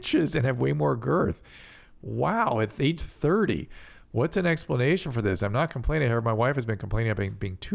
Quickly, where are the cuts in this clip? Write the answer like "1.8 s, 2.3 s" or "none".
none